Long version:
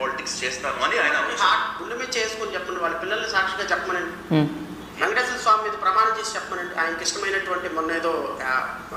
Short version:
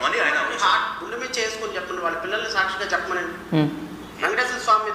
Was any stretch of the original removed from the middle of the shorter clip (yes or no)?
no